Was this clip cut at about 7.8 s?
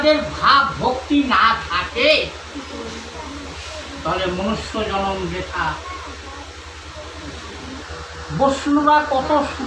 yes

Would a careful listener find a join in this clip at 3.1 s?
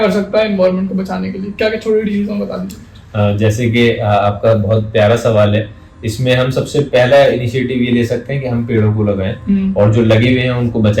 no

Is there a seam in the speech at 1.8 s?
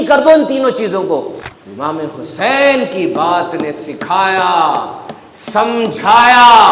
yes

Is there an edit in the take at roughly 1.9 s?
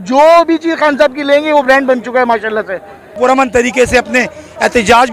no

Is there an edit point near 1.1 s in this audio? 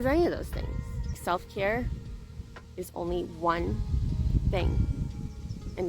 yes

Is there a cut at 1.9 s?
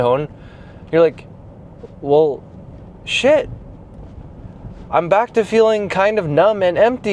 no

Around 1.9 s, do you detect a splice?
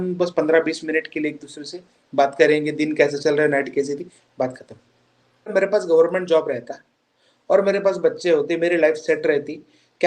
no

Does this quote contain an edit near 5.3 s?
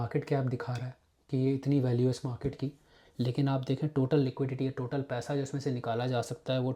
no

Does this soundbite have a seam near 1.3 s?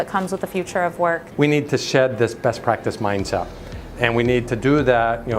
yes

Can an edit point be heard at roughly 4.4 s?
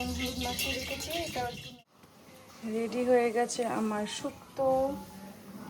no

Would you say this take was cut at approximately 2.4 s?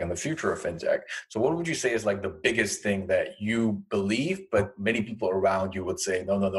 no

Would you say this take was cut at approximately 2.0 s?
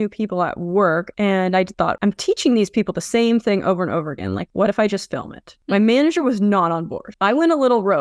yes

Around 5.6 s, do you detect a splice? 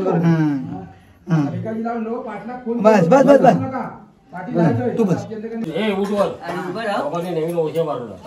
yes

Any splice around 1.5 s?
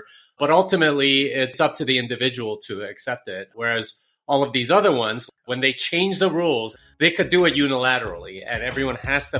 yes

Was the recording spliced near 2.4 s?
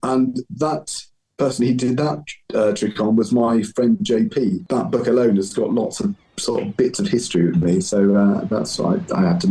no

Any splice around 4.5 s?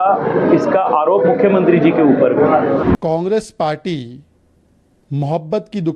no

